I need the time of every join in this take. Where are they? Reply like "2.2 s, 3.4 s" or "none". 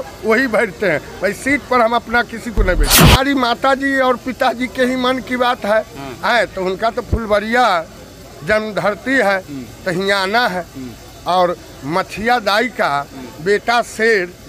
3.0 s